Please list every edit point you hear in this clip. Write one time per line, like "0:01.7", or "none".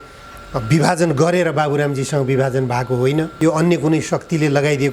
0:03.3

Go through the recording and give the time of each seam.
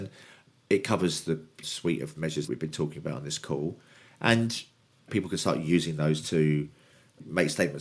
0:01.7
0:02.5
0:05.1

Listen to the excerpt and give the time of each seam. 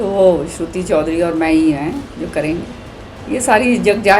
none

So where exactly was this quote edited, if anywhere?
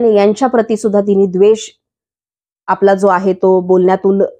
none

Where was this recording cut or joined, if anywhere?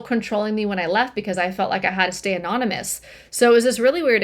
none

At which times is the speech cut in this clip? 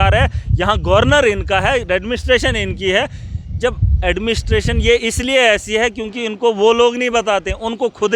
none

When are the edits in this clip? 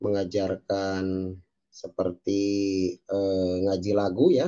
none

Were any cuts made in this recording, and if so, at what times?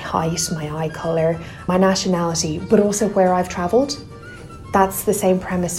0:01.5

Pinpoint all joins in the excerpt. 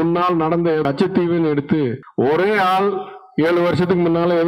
0:02.0

